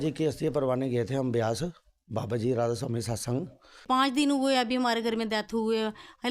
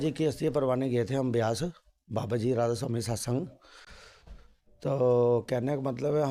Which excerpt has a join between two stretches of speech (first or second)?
first